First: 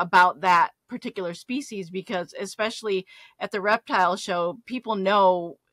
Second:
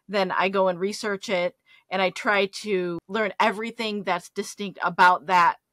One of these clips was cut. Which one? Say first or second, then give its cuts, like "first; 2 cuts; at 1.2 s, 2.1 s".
second; 1 cut; at 3.0 s